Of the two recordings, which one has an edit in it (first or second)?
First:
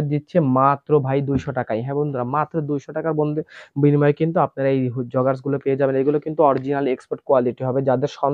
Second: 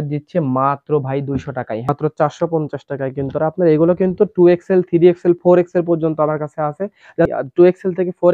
second